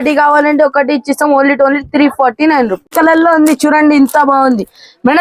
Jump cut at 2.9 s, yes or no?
yes